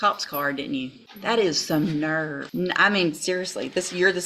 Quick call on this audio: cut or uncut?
cut